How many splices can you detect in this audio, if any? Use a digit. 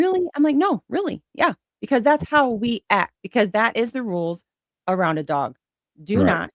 1